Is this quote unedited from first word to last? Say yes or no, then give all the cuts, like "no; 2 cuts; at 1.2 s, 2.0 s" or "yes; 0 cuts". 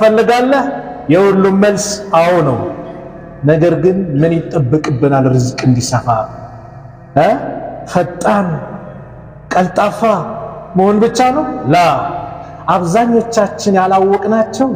yes; 0 cuts